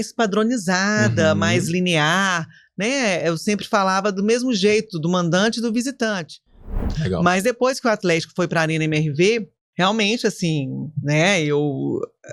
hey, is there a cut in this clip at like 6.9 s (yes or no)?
yes